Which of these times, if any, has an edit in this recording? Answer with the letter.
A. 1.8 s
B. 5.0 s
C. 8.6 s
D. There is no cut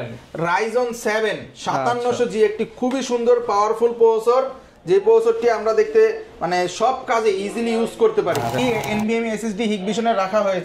C